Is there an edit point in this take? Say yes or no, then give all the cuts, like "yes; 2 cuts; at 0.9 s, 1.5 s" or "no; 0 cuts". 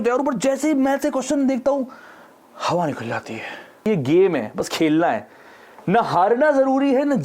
yes; 1 cut; at 3.8 s